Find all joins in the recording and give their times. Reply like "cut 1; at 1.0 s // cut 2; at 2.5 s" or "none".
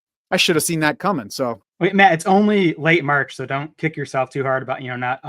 cut 1; at 1.6 s